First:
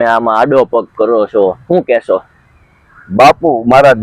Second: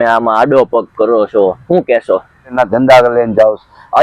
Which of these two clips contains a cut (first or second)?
second